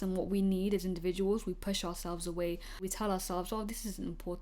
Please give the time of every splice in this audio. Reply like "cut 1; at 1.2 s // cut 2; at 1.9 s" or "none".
none